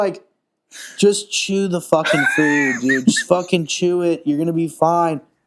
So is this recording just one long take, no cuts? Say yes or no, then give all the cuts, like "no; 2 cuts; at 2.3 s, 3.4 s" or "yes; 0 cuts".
yes; 0 cuts